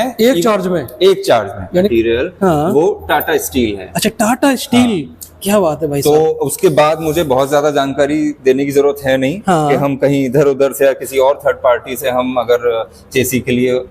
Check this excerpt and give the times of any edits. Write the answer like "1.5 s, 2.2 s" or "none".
1.7 s